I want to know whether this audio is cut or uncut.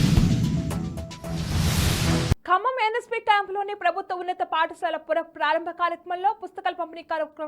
cut